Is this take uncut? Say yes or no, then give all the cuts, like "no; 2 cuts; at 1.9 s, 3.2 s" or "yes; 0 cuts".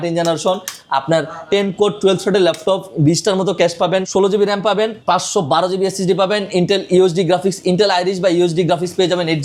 yes; 0 cuts